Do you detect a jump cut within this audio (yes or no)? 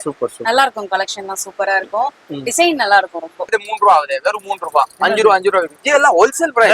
yes